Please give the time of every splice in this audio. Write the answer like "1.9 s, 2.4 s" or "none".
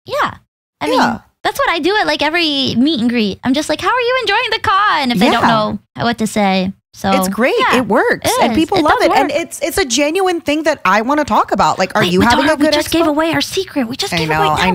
1.3 s, 5.9 s